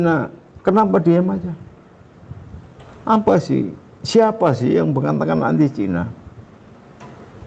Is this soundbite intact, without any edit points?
yes; 0 cuts

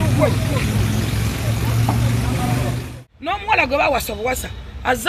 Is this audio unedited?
no; 1 cut; at 2.8 s

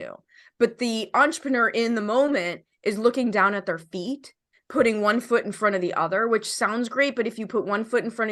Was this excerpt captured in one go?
yes; 0 cuts

